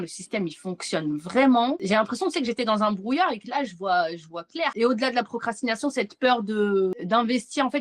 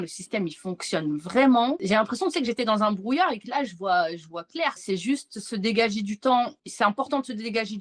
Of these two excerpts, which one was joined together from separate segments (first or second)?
first